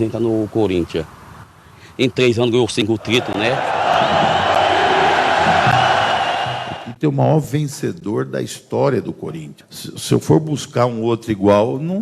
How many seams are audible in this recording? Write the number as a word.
one